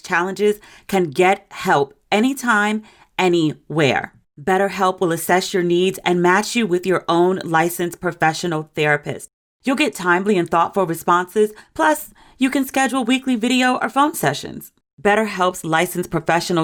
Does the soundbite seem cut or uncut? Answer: uncut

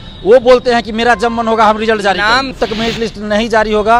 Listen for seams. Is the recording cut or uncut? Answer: cut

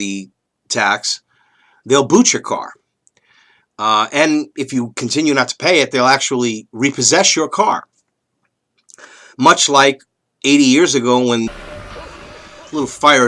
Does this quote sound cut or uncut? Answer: uncut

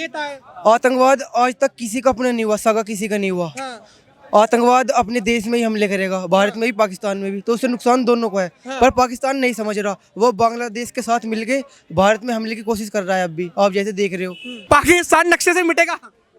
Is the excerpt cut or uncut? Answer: cut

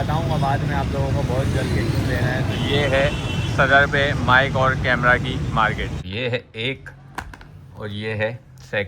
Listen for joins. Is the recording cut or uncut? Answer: cut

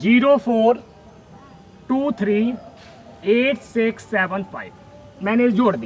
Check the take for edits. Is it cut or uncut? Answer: uncut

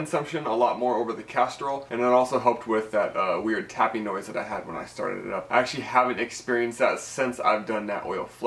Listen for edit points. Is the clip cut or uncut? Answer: cut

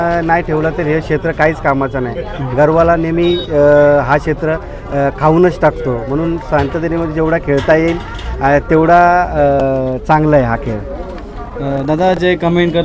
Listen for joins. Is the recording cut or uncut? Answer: uncut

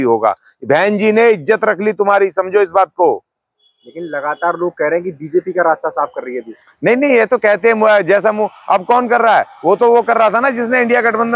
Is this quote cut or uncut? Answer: uncut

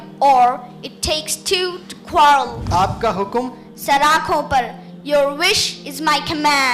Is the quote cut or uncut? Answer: cut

